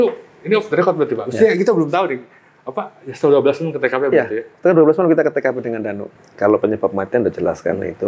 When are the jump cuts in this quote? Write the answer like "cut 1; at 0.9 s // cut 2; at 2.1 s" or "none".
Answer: cut 1; at 6.0 s